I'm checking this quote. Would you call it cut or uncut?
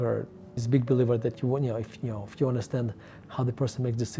uncut